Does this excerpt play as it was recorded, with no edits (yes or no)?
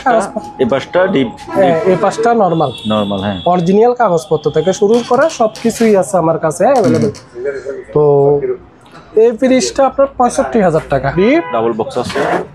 no